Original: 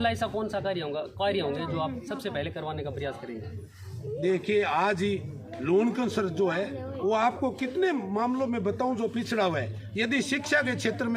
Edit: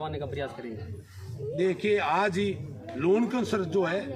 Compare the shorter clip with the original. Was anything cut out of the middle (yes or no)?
no